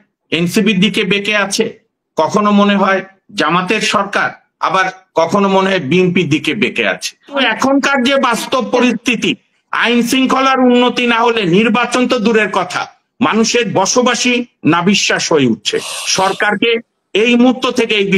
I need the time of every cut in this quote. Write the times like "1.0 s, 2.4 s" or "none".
7.4 s